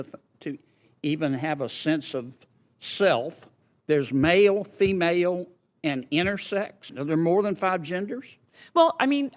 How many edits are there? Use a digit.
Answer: 1